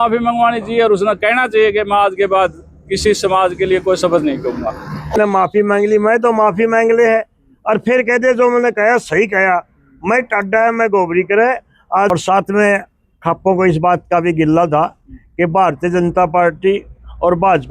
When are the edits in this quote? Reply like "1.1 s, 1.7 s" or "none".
5.1 s, 12.1 s